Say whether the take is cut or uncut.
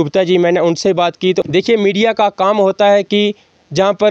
cut